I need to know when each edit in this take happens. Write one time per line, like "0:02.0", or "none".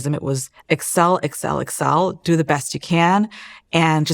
none